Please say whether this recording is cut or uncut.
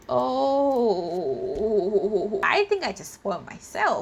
cut